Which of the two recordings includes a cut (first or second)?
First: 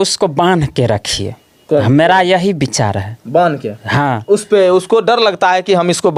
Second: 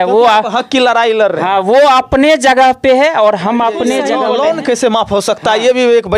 second